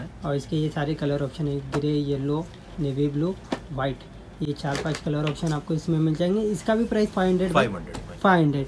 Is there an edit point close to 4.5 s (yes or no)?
no